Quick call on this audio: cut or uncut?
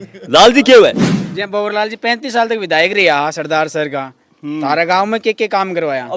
cut